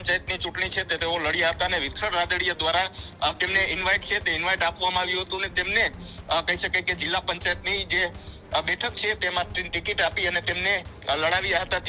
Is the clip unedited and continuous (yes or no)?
yes